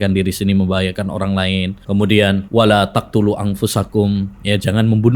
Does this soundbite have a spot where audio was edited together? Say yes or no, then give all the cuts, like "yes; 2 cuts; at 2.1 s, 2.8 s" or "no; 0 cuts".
yes; 2 cuts; at 1.8 s, 2.5 s